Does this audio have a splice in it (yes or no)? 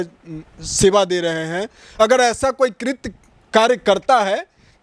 no